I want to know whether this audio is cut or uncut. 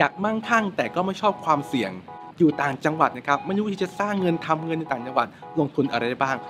uncut